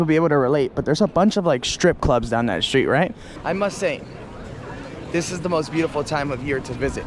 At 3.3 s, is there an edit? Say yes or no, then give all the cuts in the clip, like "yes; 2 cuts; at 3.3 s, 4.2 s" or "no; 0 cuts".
yes; 1 cut; at 3.3 s